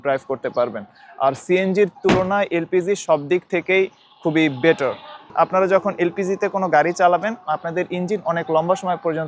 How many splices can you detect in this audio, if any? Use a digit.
0